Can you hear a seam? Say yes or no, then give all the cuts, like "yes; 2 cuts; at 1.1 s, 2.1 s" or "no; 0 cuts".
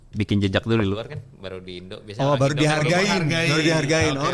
no; 0 cuts